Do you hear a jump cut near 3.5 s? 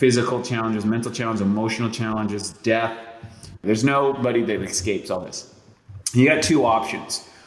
yes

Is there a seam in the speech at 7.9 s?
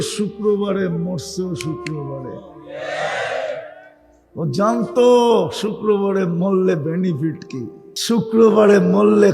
yes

